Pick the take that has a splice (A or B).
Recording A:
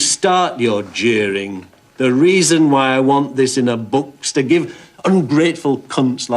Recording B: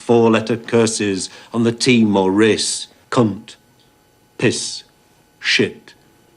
B